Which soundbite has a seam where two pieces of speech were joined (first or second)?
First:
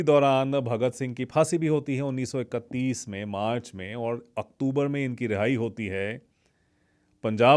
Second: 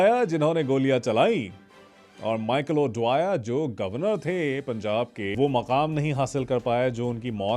second